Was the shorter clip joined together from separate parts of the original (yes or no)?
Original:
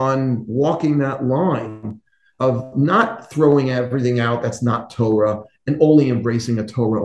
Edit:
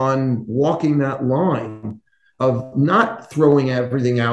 no